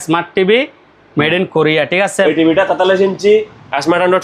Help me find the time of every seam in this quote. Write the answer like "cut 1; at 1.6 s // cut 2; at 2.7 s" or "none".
cut 1; at 2.2 s